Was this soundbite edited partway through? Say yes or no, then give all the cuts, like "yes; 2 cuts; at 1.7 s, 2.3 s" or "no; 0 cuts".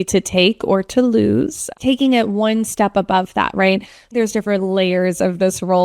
yes; 2 cuts; at 1.8 s, 4.1 s